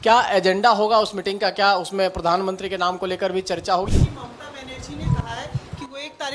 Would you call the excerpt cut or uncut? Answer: cut